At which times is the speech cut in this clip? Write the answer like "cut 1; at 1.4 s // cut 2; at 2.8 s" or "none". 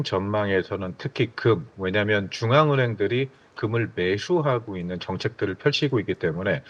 none

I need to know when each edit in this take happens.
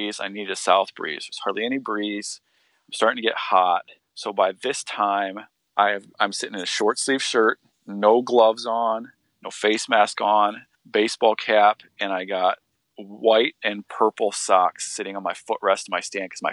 none

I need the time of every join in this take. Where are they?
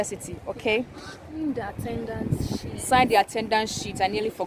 cut 1; at 1.4 s

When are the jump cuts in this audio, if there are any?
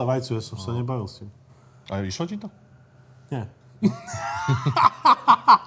none

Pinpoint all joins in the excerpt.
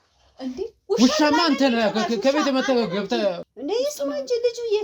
cut 1; at 3.5 s

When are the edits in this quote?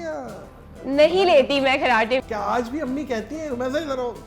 cut 1; at 2.2 s

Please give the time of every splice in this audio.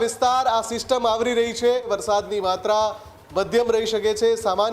cut 1; at 1.9 s

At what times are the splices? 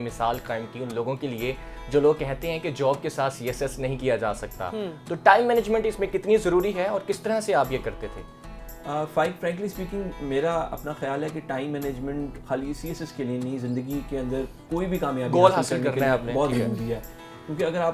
none

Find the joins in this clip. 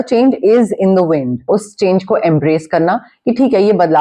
cut 1; at 1.4 s

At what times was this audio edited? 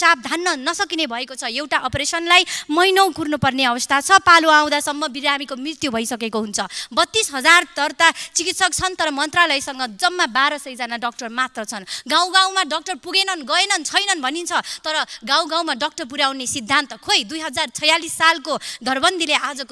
none

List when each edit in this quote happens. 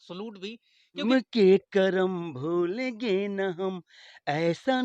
cut 1; at 1.0 s

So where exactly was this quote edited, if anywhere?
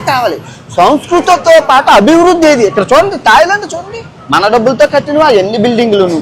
none

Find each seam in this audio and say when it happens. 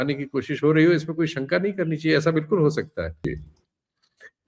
cut 1; at 3.2 s

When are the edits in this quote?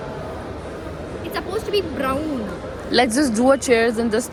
none

